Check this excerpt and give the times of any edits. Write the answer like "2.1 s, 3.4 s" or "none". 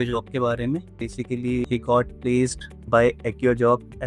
1.3 s, 2.7 s